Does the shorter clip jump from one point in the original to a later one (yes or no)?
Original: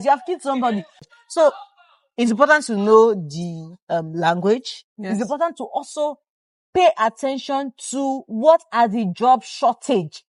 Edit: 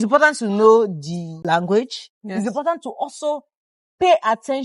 yes